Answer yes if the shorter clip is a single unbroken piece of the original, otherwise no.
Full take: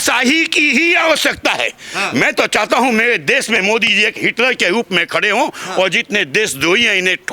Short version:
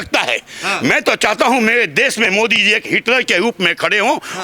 yes